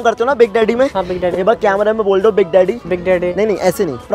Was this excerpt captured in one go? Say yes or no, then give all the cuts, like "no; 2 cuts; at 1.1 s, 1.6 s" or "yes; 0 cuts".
yes; 0 cuts